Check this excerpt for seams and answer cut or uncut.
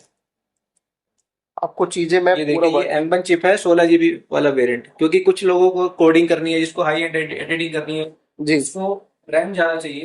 uncut